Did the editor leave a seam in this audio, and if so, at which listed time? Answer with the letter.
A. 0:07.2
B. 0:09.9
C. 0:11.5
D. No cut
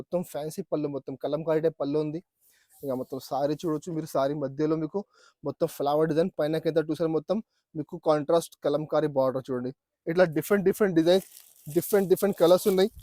B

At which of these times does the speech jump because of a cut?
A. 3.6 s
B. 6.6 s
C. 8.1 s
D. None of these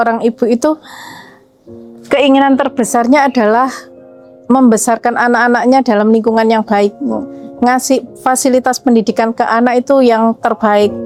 D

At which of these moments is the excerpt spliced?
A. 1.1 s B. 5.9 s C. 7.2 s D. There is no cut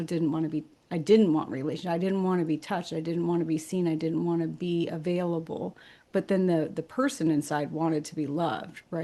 D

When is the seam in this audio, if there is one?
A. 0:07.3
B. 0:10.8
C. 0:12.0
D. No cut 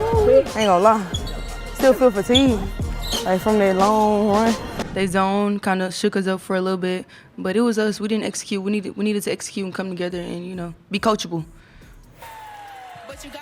C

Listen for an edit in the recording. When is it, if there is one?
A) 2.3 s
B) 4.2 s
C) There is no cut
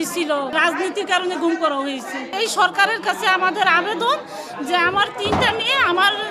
C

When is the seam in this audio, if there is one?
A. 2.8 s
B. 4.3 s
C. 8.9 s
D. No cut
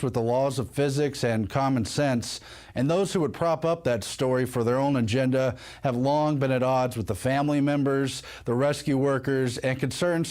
C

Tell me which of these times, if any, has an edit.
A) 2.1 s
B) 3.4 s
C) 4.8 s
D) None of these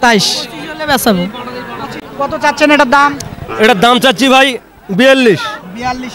A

